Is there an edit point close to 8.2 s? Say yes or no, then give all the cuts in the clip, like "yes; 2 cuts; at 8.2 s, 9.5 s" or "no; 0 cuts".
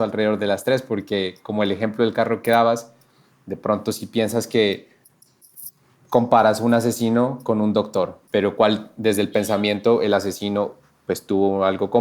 yes; 1 cut; at 8.2 s